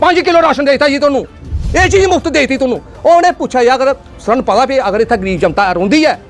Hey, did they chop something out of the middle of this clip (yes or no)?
no